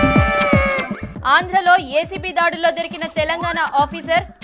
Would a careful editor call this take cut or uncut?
uncut